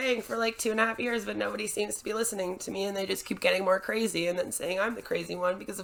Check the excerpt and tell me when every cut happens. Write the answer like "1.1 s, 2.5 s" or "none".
none